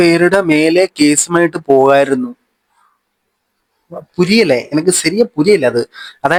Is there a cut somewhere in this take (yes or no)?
no